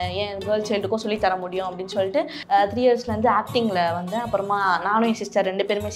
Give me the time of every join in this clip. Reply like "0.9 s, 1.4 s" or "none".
2.4 s